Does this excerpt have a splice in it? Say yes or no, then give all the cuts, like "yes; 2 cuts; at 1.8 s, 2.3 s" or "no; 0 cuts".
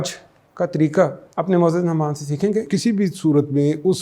yes; 2 cuts; at 1.2 s, 2.7 s